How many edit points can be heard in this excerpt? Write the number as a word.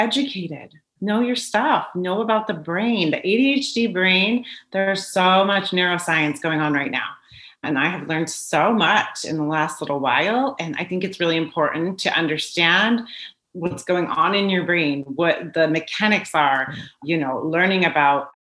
one